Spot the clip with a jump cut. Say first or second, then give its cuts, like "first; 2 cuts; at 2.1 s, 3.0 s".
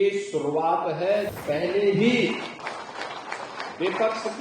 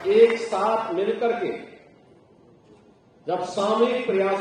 first; 1 cut; at 1.3 s